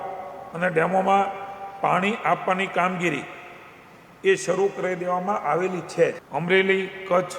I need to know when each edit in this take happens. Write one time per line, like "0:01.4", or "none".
0:06.2